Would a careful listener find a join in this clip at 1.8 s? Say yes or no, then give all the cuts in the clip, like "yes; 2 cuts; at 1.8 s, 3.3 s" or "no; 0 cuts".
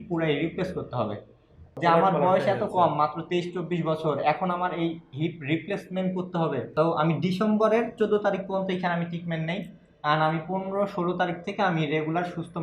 yes; 2 cuts; at 1.8 s, 6.7 s